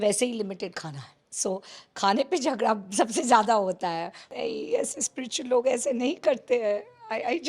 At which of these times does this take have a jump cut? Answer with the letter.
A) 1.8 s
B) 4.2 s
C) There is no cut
B